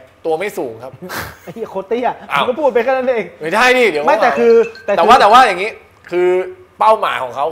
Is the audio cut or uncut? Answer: uncut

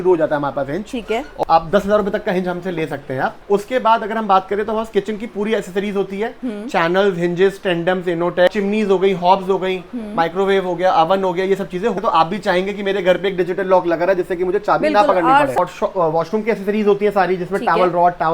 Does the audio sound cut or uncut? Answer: cut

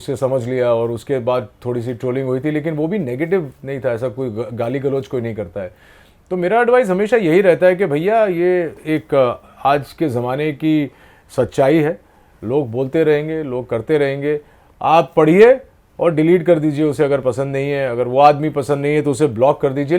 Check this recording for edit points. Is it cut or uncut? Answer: uncut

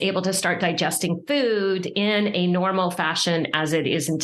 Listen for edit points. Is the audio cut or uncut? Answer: uncut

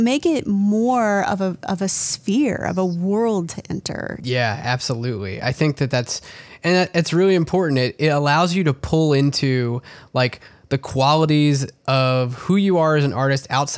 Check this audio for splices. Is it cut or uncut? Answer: cut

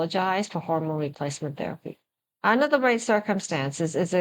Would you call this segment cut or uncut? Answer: uncut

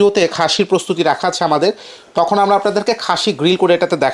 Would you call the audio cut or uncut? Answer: uncut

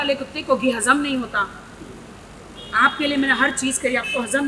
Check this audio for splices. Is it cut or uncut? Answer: uncut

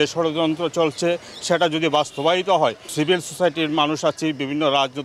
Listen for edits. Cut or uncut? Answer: uncut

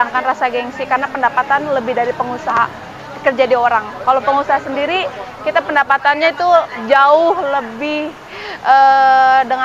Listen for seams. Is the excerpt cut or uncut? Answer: uncut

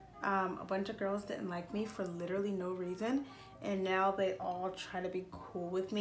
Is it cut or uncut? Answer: uncut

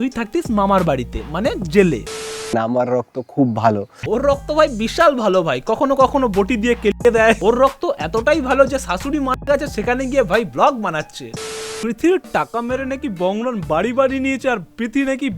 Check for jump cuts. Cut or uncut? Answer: cut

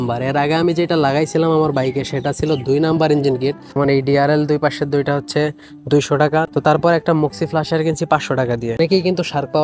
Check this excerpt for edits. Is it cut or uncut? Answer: cut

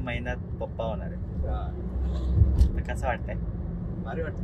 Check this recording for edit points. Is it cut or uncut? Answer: uncut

